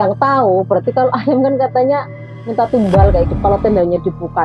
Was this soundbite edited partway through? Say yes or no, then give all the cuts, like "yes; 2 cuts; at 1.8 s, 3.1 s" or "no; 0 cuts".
yes; 1 cut; at 3.3 s